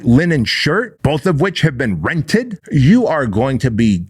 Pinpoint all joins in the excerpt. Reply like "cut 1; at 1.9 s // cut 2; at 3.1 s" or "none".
cut 1; at 0.9 s // cut 2; at 2.6 s